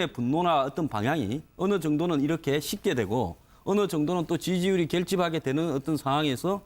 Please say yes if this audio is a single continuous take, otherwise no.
no